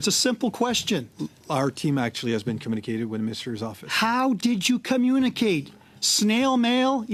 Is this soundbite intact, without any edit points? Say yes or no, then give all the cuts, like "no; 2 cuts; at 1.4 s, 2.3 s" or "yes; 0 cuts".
yes; 0 cuts